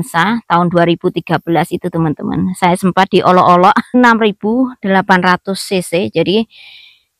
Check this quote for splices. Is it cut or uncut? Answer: cut